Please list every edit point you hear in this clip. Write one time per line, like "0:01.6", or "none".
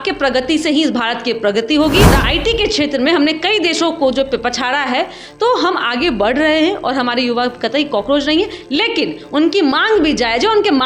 0:02.1